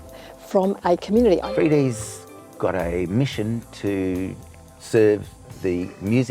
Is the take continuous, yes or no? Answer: no